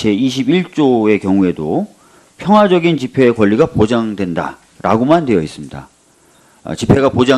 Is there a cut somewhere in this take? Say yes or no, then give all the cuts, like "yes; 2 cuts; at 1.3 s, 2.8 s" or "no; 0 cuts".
yes; 1 cut; at 2.9 s